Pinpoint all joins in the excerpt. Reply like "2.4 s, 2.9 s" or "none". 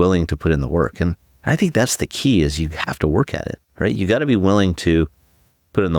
none

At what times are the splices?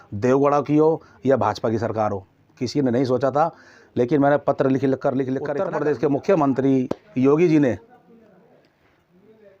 5.5 s

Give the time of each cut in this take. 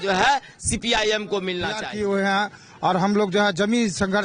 1.8 s

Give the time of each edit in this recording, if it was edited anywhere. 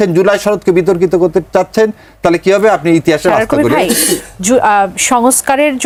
none

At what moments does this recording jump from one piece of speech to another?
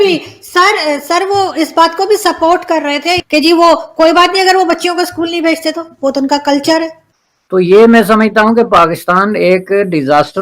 7.0 s

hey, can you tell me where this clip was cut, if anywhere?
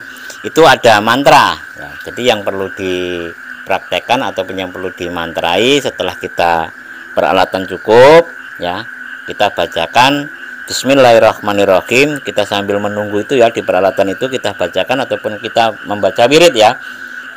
none

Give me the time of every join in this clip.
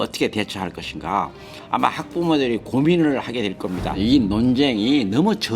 3.9 s

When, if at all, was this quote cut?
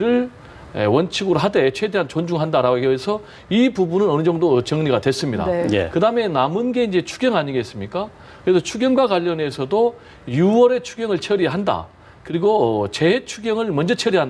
none

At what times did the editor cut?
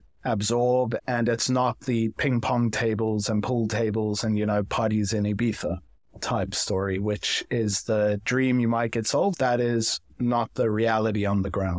1.0 s, 9.3 s

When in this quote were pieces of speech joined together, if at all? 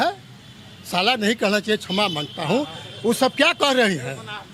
none

